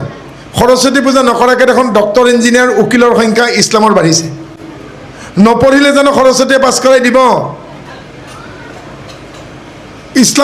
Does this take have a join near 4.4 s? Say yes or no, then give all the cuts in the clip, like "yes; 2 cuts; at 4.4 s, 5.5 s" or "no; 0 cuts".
no; 0 cuts